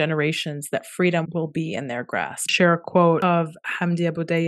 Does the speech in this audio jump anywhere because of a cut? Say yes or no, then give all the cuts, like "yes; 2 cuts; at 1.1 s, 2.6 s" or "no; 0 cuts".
yes; 3 cuts; at 1.3 s, 2.5 s, 3.2 s